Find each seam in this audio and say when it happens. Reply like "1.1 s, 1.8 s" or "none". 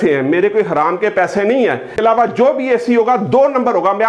2.0 s